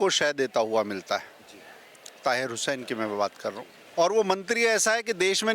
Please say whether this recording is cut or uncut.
cut